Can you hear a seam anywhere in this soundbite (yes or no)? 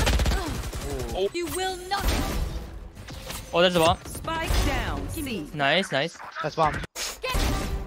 yes